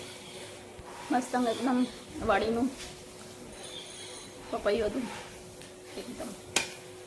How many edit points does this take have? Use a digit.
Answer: 0